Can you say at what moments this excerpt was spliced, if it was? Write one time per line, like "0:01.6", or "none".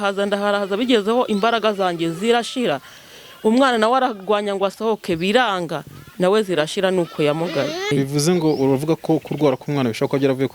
0:07.9